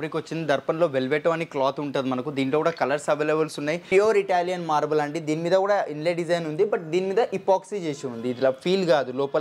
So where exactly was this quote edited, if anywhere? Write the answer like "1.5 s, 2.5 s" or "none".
3.8 s